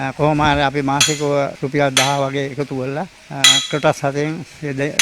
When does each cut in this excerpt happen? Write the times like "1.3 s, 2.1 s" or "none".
1.6 s, 3.2 s